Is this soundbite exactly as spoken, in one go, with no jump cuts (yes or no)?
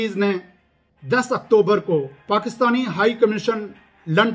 no